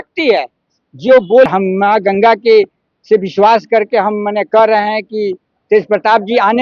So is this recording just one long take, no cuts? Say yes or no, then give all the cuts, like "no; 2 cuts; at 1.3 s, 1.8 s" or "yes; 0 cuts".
no; 1 cut; at 1.5 s